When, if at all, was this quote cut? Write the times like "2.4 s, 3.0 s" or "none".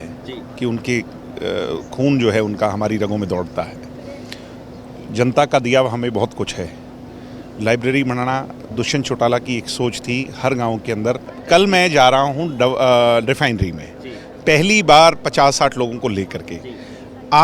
11.3 s